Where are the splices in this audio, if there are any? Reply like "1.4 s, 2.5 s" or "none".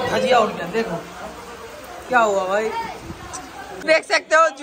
3.6 s